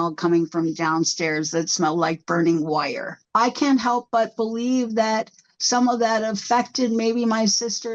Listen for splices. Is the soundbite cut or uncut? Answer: cut